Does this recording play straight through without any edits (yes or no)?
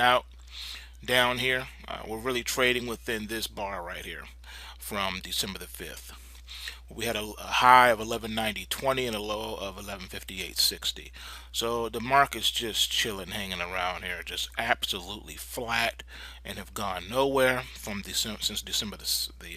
no